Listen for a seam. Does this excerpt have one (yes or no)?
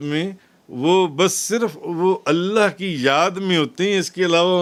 no